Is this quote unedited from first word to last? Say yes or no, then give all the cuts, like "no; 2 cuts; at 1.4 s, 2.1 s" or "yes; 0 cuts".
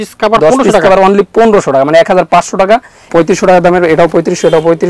no; 1 cut; at 3.1 s